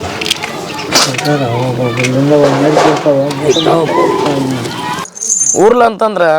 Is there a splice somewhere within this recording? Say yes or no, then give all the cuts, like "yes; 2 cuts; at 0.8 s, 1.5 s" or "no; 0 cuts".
yes; 1 cut; at 5.1 s